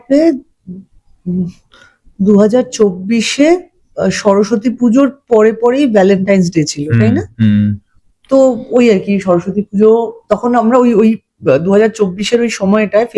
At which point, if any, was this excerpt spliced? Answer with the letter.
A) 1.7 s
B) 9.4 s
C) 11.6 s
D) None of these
D